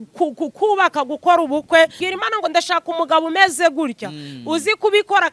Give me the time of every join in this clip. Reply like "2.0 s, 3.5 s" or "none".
2.0 s